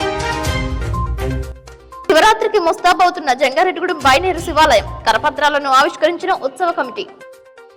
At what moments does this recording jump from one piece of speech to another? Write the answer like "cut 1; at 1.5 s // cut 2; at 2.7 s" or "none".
cut 1; at 1.0 s